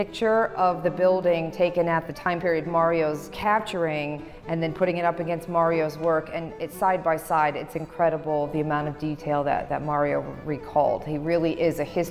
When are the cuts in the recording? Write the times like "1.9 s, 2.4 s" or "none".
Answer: 2.1 s, 3.3 s

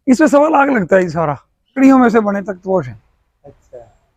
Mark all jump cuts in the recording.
1.7 s

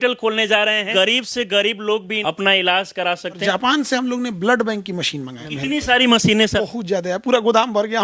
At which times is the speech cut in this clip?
0.9 s, 2.1 s, 3.4 s, 5.4 s, 6.6 s

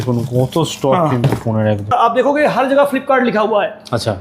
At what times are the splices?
1.9 s

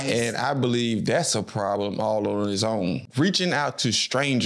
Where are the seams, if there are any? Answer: 3.1 s

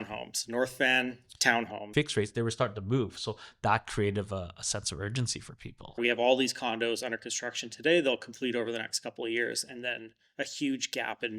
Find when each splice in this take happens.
1.8 s, 6.0 s

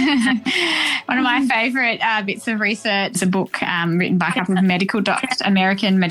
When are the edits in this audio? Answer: 3.2 s

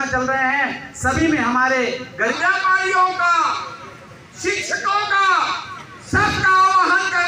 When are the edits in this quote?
2.3 s

